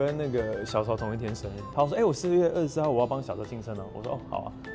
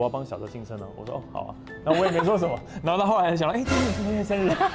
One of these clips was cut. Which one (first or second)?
first